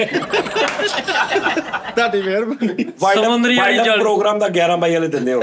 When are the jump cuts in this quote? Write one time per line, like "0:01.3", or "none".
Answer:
0:02.9